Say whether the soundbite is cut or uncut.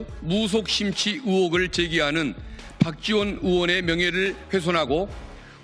uncut